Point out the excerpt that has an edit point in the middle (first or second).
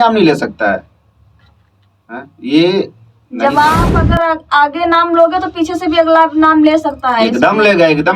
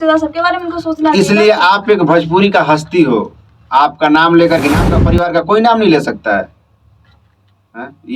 second